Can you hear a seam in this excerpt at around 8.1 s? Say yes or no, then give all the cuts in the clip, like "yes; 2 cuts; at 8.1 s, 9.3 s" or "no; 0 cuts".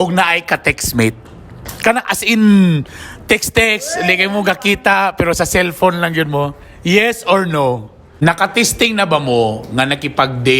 yes; 1 cut; at 8.1 s